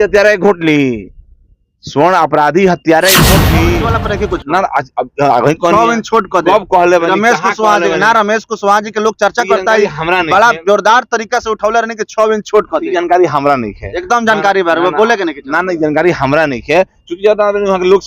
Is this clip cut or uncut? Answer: cut